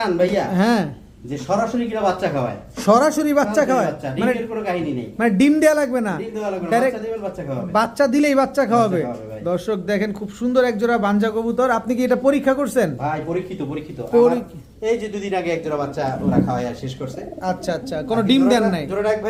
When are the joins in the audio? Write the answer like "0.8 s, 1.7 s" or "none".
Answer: none